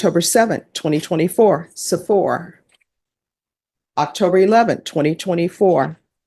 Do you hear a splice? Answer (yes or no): no